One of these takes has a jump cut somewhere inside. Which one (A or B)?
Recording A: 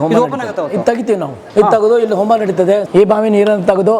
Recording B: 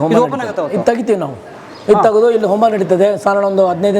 A